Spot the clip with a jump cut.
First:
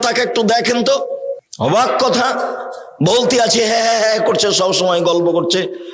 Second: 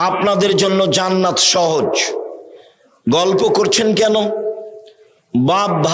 first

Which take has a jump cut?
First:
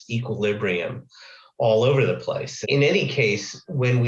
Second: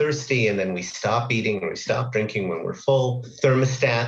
first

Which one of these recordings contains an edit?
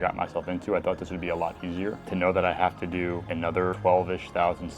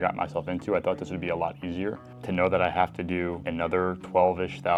first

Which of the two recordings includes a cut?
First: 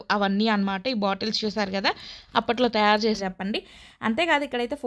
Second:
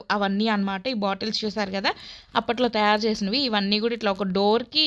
first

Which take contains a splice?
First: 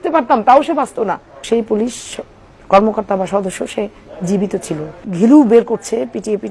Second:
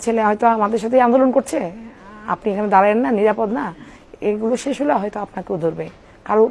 first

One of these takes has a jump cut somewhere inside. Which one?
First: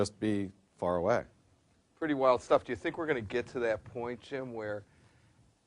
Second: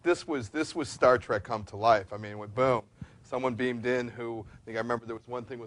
first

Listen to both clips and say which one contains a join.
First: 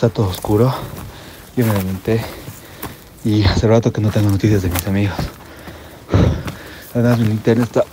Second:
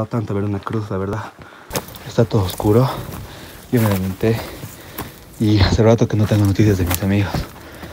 second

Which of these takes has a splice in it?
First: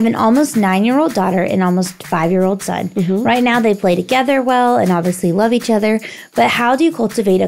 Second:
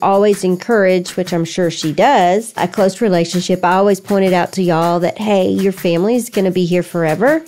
second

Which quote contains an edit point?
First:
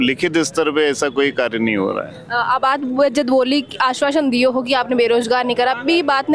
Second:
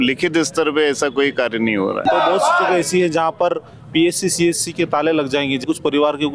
second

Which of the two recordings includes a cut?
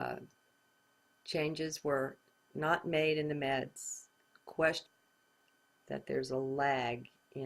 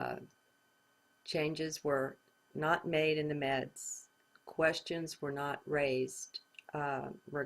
second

